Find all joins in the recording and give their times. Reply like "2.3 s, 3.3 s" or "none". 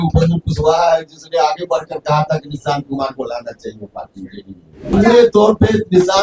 4.9 s